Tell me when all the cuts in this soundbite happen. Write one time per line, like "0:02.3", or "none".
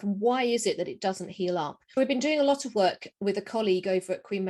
0:02.0